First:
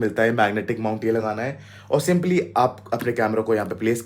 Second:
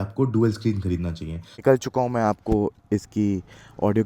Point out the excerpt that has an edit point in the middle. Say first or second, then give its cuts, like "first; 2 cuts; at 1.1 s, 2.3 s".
second; 1 cut; at 1.5 s